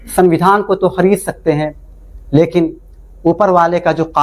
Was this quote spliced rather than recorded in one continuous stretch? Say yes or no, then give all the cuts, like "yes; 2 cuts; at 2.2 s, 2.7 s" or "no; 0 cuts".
no; 0 cuts